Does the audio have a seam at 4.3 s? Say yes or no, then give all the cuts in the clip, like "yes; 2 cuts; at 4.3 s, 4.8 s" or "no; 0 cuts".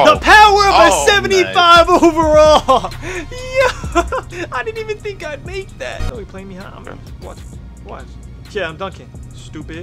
yes; 2 cuts; at 4.3 s, 6.0 s